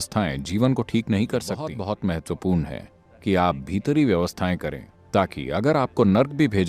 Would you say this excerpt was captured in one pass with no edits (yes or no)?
no